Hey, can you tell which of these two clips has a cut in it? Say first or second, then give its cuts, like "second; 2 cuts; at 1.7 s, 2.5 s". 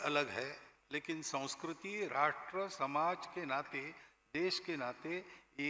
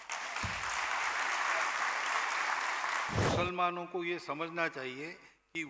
second; 1 cut; at 3.3 s